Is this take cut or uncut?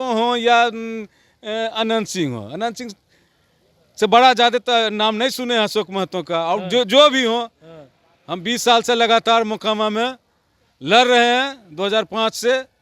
uncut